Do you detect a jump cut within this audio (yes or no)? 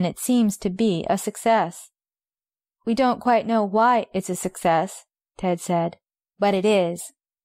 yes